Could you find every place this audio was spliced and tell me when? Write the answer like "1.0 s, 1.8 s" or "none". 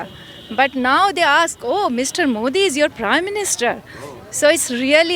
none